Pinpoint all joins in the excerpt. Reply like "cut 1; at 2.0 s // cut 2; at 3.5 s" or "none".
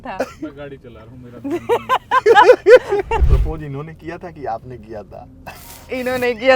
cut 1; at 3.2 s